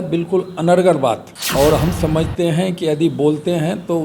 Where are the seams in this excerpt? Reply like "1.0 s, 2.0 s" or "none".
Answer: 1.3 s